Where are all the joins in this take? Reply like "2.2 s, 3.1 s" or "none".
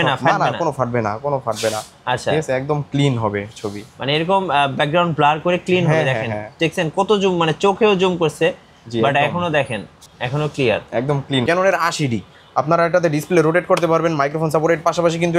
11.4 s